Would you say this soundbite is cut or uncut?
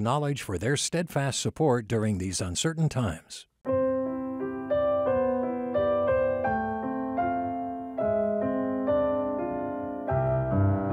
cut